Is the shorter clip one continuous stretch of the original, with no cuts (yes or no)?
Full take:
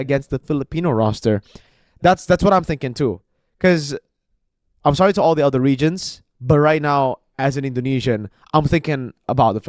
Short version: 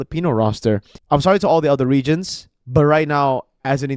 no